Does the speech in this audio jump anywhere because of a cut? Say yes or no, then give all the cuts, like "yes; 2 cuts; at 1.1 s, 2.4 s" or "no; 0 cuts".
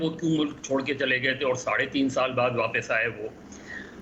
no; 0 cuts